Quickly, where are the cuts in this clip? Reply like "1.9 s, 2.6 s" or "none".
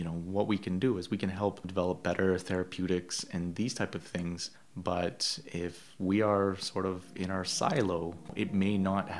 none